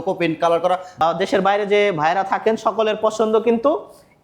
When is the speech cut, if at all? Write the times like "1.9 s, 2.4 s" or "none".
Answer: 1.0 s

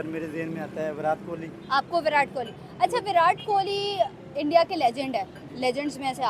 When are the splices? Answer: none

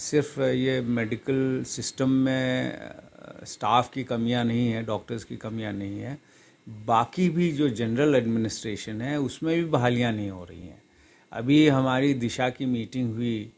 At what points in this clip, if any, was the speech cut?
none

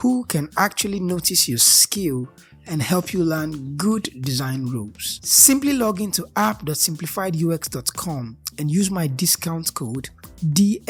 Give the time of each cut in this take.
none

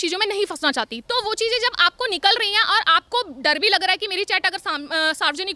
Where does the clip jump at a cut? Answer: 0.9 s

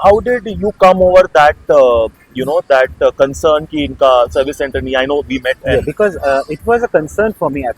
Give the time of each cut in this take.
none

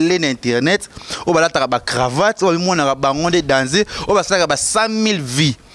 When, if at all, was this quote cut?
none

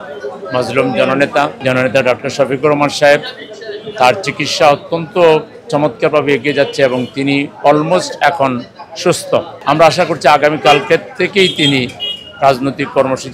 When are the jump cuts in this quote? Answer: 1.6 s, 9.5 s

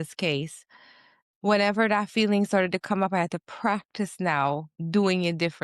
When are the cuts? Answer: 4.7 s

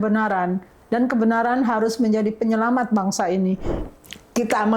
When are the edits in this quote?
3.8 s

